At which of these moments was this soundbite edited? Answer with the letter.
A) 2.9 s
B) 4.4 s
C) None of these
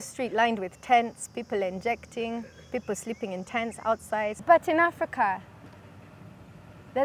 B